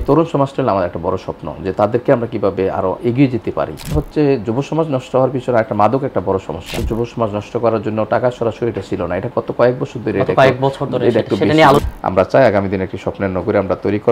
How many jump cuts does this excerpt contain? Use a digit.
3